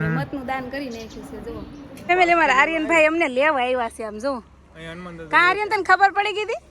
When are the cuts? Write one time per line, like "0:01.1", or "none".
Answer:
0:02.1